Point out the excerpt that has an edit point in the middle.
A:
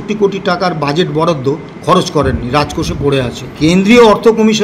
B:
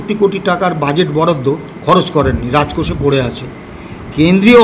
A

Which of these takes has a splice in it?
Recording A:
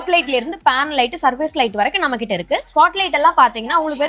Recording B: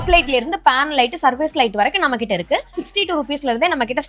B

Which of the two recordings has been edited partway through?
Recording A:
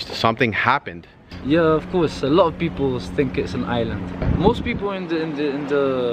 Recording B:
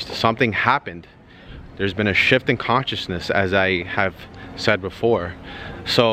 A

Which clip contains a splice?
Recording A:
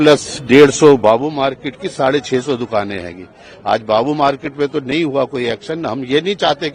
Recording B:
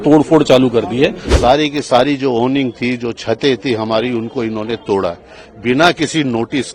B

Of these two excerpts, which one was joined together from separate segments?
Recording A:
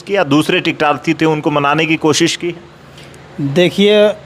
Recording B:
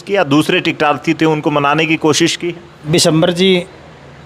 B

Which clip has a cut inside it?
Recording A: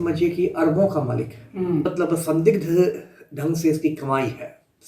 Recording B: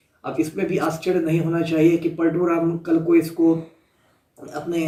A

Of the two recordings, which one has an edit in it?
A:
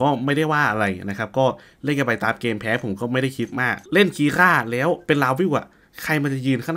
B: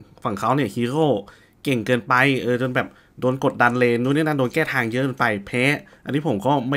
A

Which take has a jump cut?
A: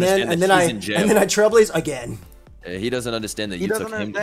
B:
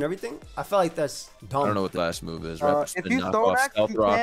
B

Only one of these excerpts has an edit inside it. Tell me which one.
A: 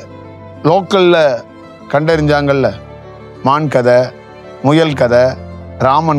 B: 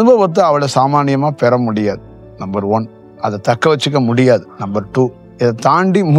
B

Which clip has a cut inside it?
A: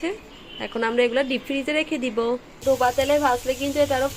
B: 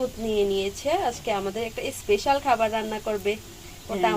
A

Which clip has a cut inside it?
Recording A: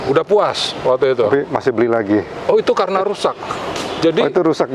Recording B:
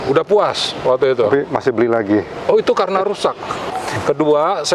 B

